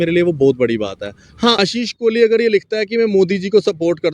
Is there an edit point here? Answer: yes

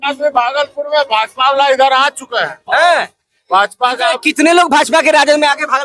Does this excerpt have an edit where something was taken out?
no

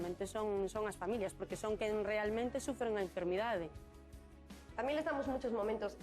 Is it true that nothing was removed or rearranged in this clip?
no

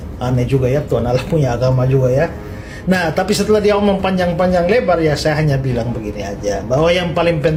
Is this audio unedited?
yes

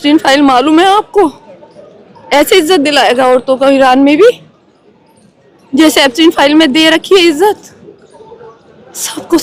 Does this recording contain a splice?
no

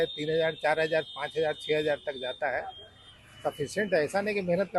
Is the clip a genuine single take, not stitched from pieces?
yes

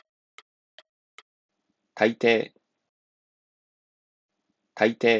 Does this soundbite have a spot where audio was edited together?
yes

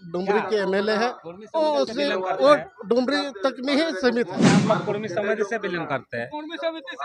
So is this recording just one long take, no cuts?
no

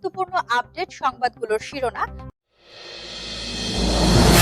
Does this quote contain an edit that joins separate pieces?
yes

